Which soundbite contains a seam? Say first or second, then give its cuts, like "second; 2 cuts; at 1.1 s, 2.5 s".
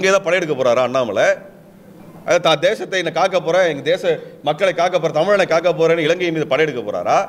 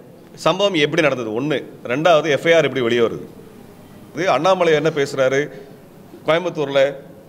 second; 1 cut; at 4.2 s